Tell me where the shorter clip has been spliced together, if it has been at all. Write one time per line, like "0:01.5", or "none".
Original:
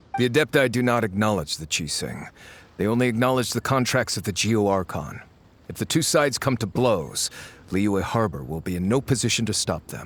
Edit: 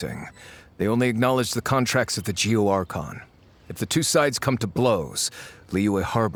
none

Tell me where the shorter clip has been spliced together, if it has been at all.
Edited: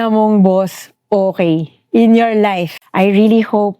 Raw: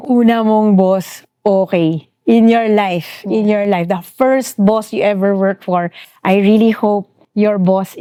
0:02.8

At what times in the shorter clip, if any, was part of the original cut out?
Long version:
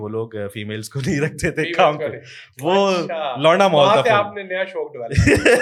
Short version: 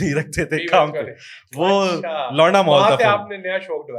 none

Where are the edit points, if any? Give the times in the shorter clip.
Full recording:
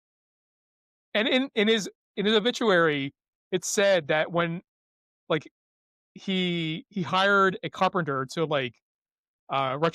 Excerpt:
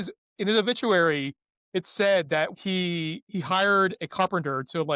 0:02.5

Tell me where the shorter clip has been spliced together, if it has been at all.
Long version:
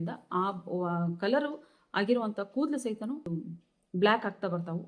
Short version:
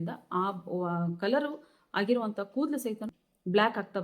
0:03.1

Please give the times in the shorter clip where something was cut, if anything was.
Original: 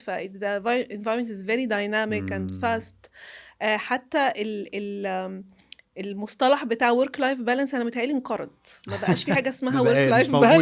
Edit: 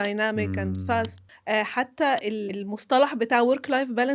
0:01.3
0:02.5

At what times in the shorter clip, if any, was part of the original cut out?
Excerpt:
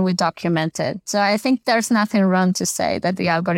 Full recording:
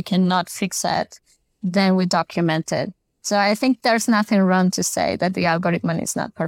0:01.0

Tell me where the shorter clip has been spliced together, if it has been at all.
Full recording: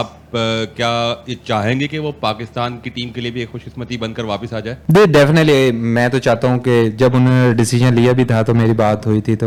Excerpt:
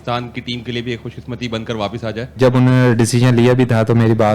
0:02.3

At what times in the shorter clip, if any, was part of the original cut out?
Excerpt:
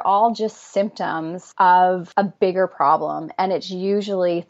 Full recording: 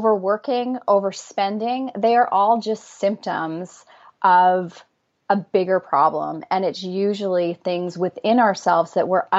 0:01.4
0:02.0

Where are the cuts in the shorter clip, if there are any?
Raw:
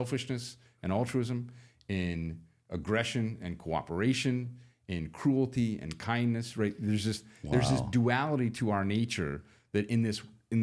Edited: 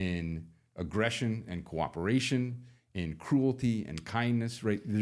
none

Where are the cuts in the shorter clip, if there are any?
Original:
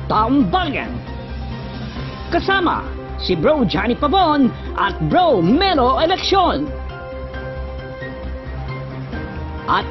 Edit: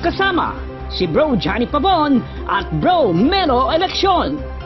none

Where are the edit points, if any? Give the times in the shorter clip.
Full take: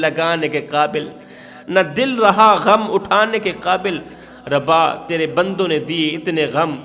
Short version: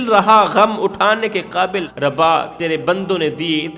0:01.9

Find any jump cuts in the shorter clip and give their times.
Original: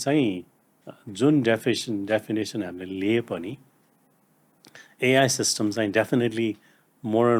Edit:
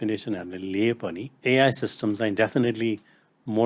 0:01.3

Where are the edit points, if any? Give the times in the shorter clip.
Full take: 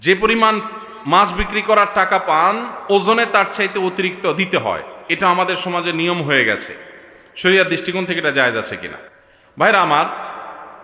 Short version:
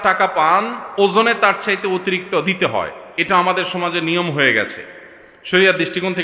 none

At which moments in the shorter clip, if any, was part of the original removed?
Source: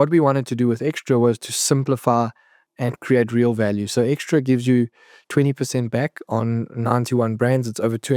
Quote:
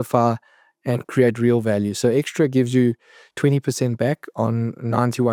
none

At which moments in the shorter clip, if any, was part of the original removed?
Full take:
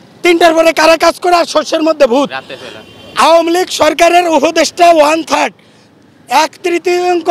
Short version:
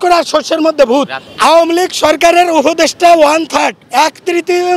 0:01.2
0:03.8

